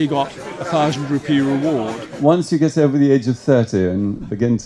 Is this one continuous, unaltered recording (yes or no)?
no